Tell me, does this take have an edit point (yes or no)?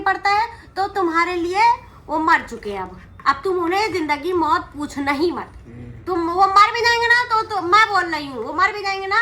no